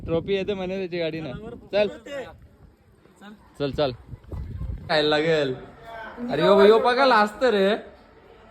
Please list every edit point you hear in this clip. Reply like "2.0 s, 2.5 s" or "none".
4.9 s